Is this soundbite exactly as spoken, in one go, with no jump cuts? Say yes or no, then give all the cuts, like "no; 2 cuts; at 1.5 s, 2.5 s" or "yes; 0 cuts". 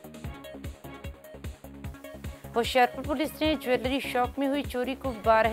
no; 1 cut; at 2.5 s